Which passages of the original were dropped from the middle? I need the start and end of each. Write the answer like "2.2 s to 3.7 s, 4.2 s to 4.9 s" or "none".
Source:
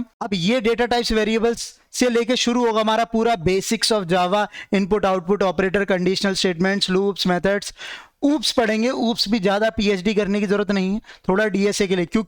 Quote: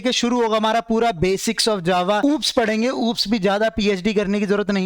4.4 s to 8.2 s